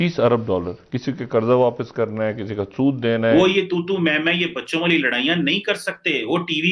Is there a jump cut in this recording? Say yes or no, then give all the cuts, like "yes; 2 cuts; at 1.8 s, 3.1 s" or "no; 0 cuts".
yes; 1 cut; at 3.3 s